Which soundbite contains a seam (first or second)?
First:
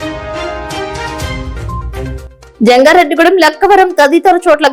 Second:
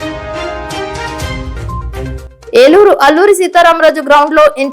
second